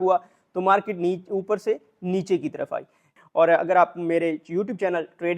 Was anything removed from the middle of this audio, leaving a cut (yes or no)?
yes